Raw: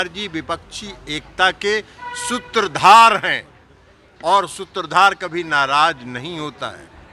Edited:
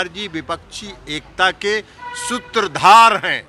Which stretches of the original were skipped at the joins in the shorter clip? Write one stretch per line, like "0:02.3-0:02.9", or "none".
none

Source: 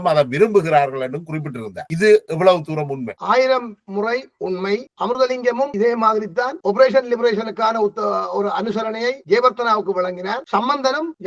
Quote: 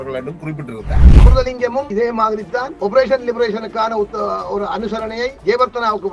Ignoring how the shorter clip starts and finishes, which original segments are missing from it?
0:01.9-0:04.9

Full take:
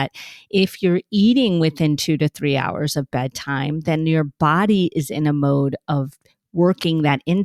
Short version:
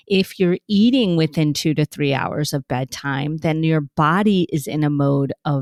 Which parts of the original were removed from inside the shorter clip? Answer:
none

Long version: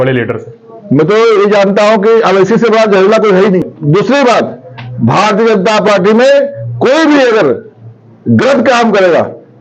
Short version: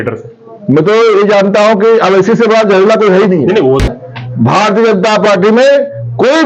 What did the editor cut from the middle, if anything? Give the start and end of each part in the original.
0:04.0-0:04.4

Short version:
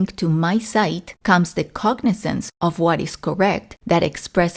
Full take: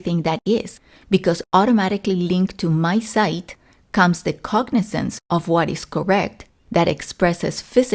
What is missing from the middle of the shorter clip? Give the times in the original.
0:03.5-0:03.8
0:06.4-0:06.6

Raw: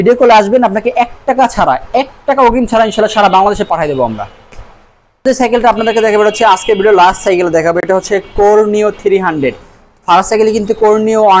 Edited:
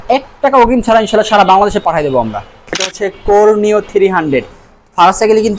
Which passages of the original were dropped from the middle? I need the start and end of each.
0:04.9-0:08.2

